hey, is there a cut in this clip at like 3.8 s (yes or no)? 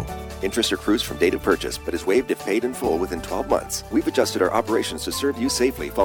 yes